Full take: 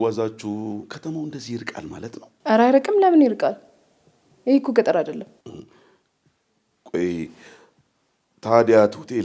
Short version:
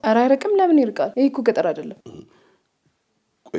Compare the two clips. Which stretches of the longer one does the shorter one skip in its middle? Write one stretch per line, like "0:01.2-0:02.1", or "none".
0:03.5-0:04.4
0:05.3-0:05.4